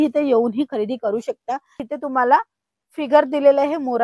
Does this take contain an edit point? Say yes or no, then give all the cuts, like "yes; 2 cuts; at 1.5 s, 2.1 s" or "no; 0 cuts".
yes; 1 cut; at 1.8 s